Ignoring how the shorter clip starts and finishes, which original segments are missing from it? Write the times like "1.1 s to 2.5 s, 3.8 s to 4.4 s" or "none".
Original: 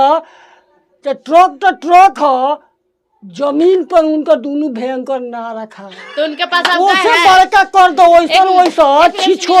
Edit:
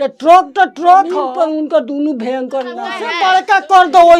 2.3 s to 3.8 s, 5.7 s to 7.2 s